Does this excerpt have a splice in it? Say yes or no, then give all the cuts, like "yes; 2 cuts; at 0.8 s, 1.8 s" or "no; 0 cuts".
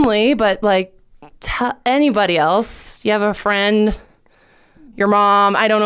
no; 0 cuts